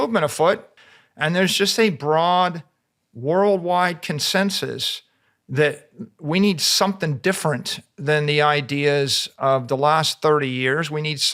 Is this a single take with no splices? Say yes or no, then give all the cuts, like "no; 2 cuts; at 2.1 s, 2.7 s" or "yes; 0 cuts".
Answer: yes; 0 cuts